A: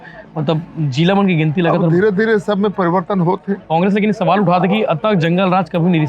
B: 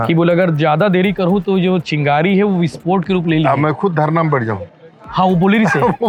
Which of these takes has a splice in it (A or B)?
A